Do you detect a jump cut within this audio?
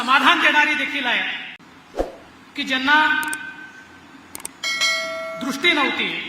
yes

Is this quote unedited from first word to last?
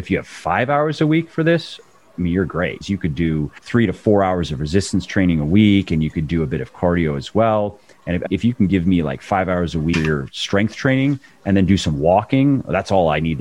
no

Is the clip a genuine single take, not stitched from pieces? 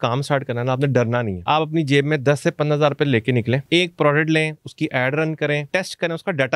no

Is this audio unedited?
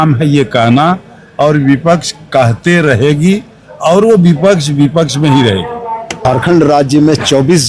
no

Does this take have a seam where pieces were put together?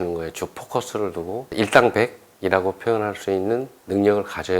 yes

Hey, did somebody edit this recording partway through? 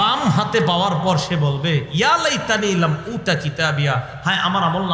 no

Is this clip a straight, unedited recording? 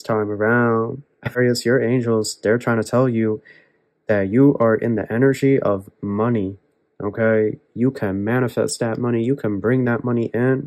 no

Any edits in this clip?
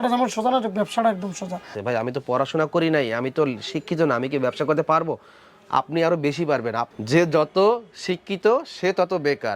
yes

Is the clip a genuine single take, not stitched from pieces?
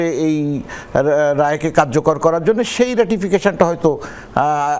yes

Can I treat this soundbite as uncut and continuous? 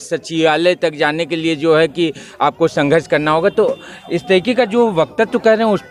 yes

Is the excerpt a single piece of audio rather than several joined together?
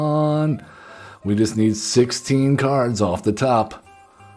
yes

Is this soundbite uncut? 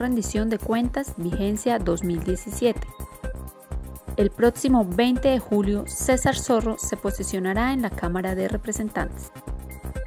yes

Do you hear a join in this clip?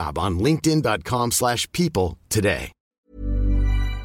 yes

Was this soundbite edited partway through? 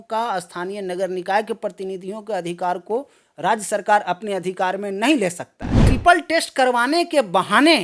yes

